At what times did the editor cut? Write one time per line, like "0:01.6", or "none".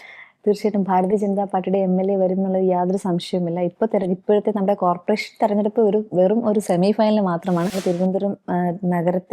0:07.7